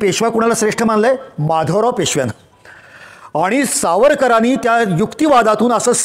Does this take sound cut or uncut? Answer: uncut